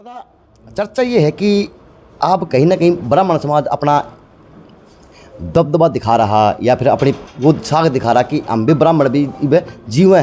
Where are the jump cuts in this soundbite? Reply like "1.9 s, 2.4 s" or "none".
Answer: none

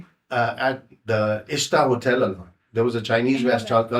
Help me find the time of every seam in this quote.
none

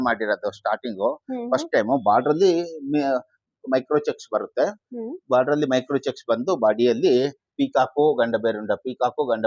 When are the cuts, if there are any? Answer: none

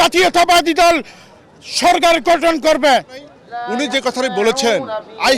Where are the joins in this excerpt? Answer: 3.0 s

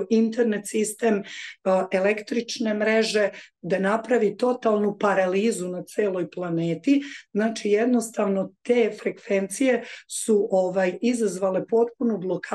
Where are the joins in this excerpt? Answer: none

